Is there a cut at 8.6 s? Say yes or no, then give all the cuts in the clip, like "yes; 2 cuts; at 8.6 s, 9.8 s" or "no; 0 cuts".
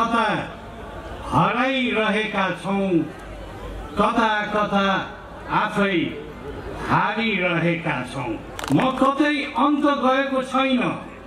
yes; 1 cut; at 8.6 s